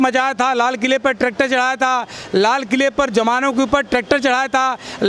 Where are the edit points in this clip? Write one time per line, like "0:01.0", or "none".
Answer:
none

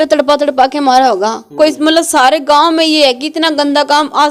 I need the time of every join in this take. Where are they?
none

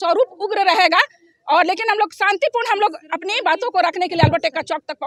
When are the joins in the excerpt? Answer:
none

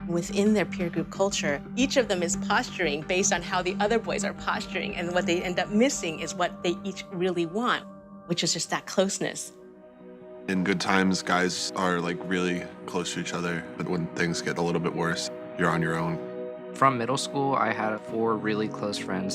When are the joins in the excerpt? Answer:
0:09.0

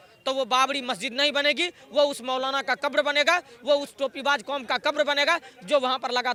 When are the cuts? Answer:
none

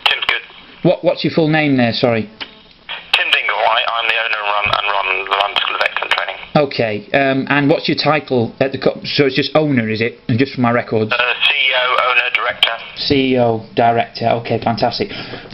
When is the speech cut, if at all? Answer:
0:12.5

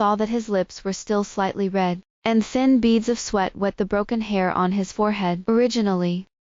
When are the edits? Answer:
0:05.4

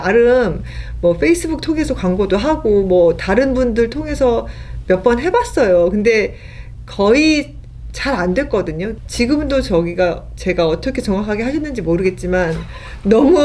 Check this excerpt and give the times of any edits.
0:08.9

